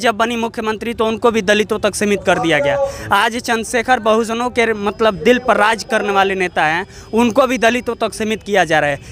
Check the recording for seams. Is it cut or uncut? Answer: uncut